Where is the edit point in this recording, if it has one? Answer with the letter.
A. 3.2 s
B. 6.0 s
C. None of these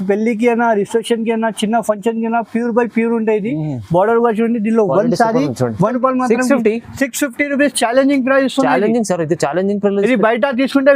B